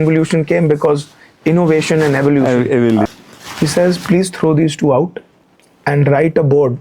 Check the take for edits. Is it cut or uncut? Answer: cut